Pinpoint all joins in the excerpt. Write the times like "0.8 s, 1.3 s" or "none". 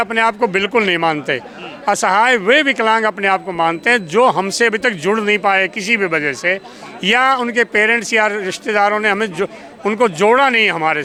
none